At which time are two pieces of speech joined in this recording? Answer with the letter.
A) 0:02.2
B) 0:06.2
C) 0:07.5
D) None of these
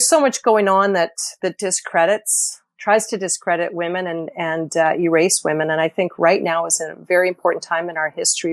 D